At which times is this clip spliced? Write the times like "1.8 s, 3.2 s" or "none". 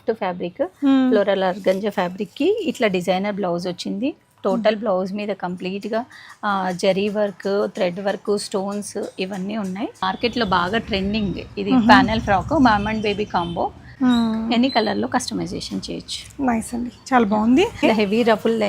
10.0 s, 13.8 s, 17.8 s